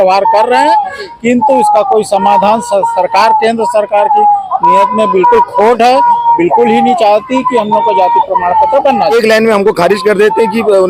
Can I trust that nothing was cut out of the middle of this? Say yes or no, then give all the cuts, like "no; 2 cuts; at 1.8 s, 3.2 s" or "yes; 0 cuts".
no; 1 cut; at 9.1 s